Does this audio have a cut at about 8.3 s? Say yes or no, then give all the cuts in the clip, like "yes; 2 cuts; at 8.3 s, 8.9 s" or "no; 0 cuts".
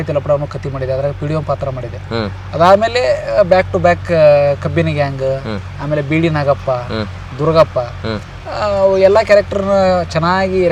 no; 0 cuts